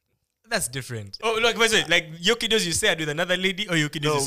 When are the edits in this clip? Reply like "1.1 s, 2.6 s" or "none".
1.1 s